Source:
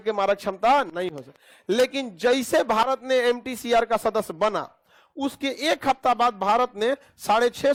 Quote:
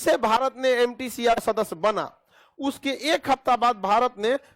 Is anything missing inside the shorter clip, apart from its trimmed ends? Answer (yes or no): yes